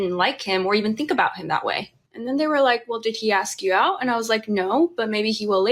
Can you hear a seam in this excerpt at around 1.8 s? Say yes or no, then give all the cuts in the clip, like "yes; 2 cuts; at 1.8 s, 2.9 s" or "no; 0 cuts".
yes; 1 cut; at 1.8 s